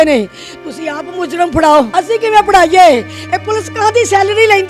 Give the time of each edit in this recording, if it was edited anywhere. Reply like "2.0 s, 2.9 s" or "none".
1.9 s